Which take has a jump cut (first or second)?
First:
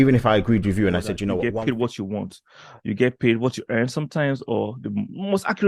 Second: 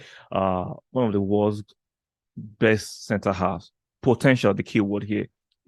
first